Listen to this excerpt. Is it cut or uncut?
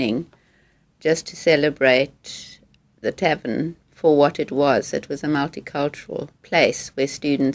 cut